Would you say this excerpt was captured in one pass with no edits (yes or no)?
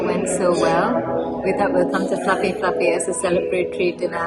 yes